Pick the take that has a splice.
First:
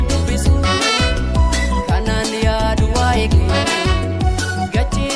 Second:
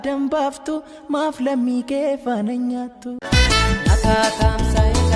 second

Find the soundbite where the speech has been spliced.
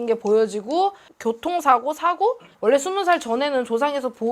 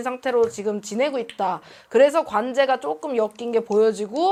first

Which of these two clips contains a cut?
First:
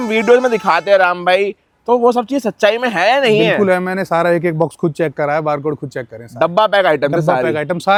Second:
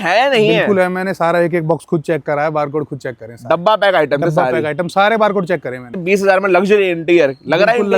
second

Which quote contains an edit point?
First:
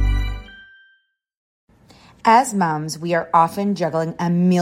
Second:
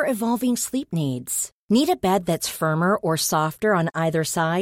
first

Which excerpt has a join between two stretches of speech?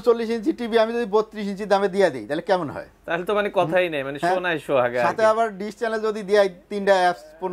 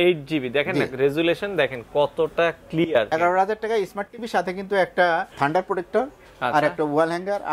second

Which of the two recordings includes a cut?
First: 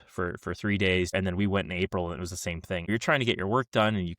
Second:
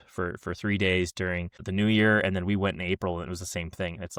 first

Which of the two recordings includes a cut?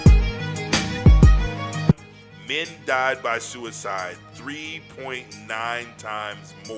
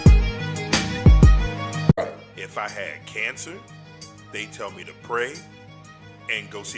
second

